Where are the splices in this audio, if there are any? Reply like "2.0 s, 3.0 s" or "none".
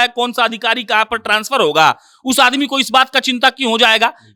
none